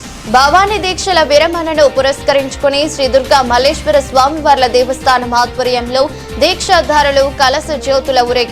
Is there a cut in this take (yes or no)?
no